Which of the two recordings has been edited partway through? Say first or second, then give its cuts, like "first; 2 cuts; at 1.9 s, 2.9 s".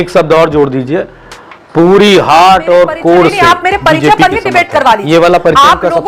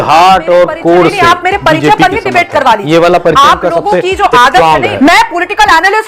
second; 1 cut; at 4.9 s